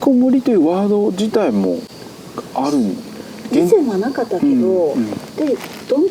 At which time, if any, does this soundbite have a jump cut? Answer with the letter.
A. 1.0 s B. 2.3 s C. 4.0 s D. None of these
D